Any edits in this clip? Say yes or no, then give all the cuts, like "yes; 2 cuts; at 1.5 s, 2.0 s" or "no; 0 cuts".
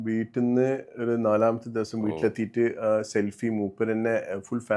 no; 0 cuts